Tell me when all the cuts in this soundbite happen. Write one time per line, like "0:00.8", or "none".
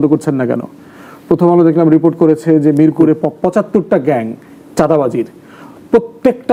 none